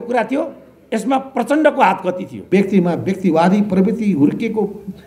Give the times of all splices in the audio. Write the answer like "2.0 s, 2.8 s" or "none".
2.3 s